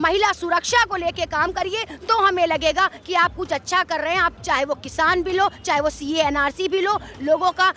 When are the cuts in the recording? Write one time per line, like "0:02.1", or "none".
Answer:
0:04.4